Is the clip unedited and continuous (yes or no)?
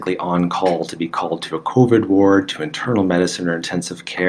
yes